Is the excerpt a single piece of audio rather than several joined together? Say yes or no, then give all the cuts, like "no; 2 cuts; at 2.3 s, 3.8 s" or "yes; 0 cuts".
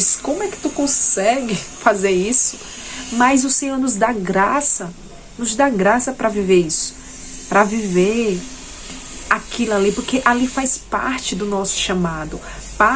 yes; 0 cuts